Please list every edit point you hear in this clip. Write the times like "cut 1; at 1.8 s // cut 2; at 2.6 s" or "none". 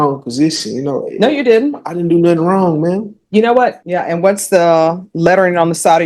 cut 1; at 3.8 s